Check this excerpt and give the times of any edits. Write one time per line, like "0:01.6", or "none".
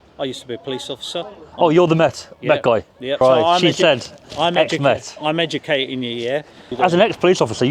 0:03.1
0:06.7